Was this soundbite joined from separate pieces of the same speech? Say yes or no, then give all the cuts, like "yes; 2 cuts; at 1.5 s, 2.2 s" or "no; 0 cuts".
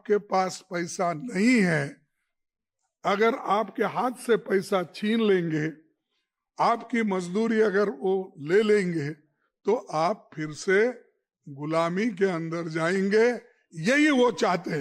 no; 0 cuts